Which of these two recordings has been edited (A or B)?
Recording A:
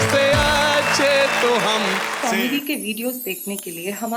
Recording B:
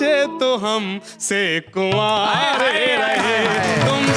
A